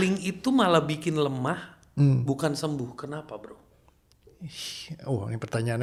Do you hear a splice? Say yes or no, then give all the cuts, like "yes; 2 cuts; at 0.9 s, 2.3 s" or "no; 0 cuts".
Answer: no; 0 cuts